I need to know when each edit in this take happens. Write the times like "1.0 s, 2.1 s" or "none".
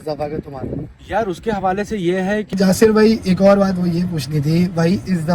2.5 s